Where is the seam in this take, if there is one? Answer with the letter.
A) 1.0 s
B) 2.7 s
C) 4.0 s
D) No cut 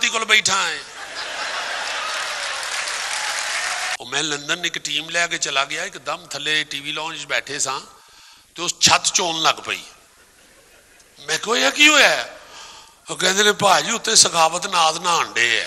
C